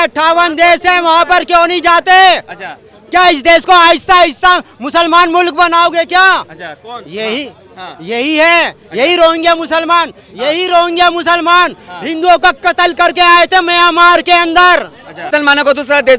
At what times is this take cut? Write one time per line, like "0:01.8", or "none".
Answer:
0:15.3